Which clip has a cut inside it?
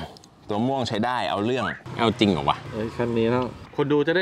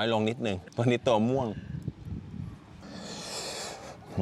first; 1 cut; at 1.8 s

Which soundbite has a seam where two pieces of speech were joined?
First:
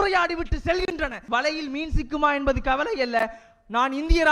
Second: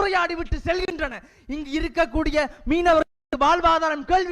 first; 1 cut; at 1.2 s

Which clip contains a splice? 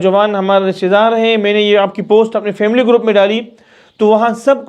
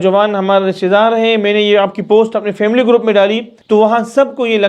second; 1 cut; at 3.5 s

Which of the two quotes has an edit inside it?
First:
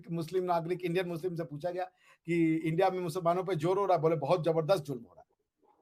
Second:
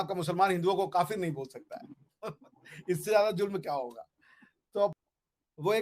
second; 1 cut; at 4.9 s

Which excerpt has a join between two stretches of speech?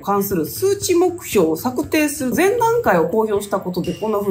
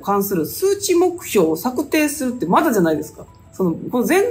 first; 1 cut; at 2.3 s

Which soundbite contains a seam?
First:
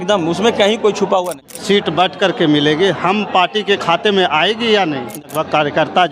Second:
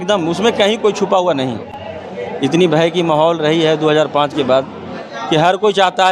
first; 2 cuts; at 1.5 s, 5.2 s

